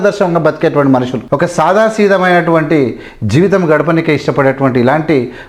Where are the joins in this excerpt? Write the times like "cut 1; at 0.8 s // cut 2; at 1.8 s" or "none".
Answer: cut 1; at 1.2 s

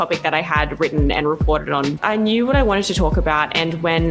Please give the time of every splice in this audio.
cut 1; at 2.0 s

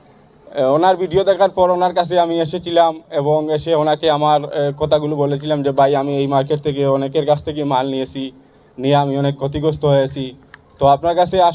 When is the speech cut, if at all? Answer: none

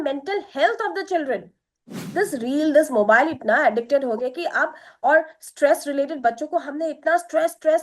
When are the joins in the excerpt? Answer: cut 1; at 2.0 s

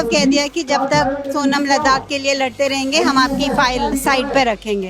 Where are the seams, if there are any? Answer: cut 1; at 3.9 s

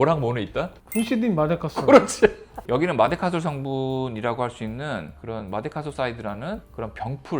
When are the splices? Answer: cut 1; at 2.6 s

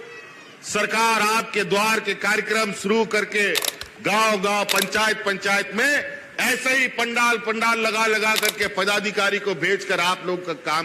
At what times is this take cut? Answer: none

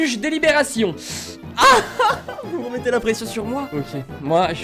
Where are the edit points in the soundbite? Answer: cut 1; at 0.9 s // cut 2; at 3.7 s

